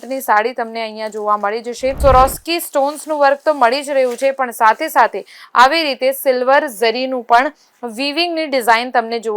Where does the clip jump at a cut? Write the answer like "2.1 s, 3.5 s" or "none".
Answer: 2.0 s